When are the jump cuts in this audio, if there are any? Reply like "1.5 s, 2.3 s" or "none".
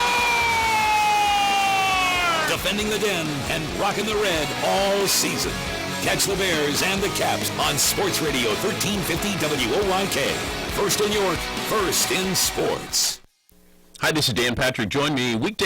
13.1 s